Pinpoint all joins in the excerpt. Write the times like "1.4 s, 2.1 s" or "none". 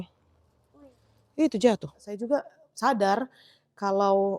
2.1 s